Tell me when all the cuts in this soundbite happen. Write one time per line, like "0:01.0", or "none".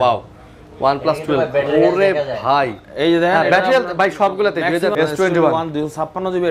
0:04.9